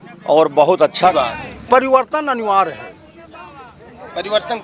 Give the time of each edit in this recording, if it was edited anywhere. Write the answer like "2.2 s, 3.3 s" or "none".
1.1 s